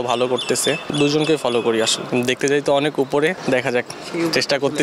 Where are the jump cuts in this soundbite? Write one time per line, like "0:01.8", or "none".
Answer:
0:00.9
0:02.0
0:03.4

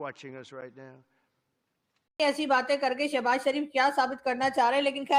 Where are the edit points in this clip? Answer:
none

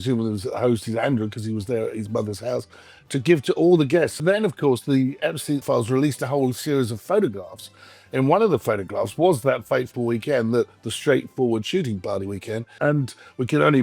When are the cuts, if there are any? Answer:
0:04.2
0:05.6
0:12.7

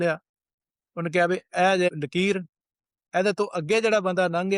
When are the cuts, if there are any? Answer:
0:01.9

